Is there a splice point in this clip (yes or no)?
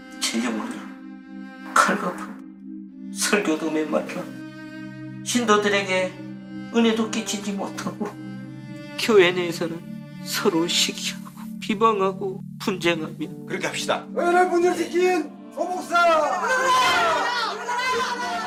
no